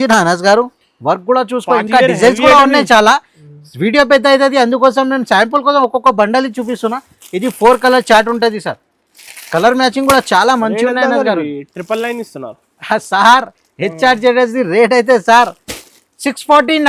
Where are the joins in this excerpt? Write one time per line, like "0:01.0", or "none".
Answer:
none